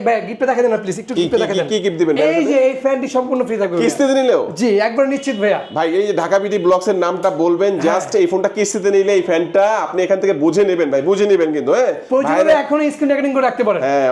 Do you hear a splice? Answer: no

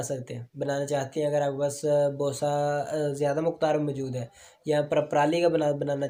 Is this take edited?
no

